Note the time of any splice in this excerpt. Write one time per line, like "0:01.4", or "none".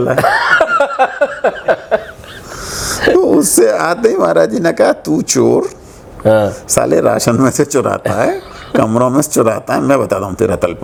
none